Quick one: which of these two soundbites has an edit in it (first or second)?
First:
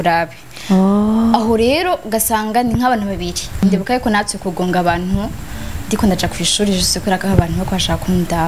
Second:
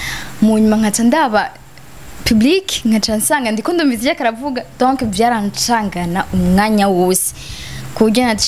first